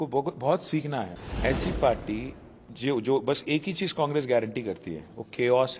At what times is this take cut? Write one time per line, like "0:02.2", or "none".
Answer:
0:01.2